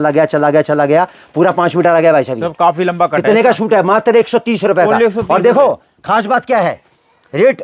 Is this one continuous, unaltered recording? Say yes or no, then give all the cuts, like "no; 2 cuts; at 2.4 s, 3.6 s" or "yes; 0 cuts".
yes; 0 cuts